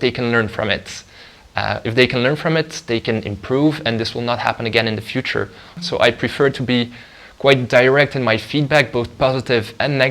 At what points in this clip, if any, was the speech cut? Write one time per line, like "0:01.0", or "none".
0:05.8